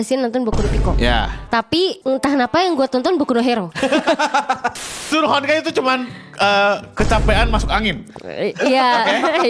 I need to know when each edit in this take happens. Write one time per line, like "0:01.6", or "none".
0:02.0
0:03.7
0:05.0